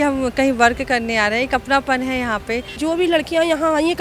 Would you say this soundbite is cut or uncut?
cut